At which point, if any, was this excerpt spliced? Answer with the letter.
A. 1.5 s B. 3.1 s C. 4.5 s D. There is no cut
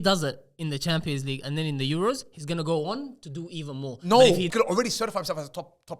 C